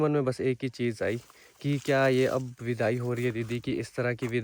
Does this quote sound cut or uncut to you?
uncut